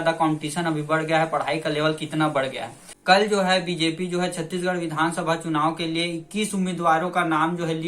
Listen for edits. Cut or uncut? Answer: cut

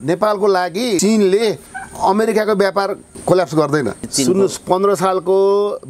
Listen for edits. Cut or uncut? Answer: cut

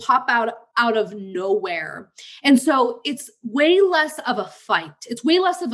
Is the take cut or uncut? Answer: uncut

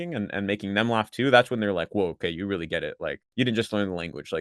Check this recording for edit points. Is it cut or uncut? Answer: cut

